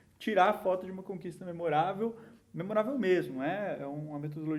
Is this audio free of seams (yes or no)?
yes